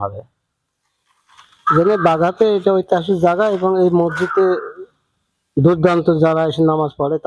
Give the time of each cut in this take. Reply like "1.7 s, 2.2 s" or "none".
none